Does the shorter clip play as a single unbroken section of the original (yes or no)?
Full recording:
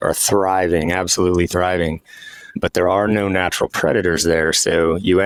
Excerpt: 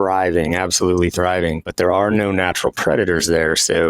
no